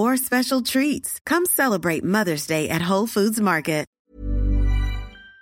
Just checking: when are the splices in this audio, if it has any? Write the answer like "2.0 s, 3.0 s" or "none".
4.0 s